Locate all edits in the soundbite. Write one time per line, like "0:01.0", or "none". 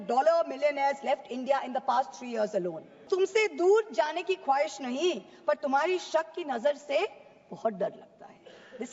0:03.0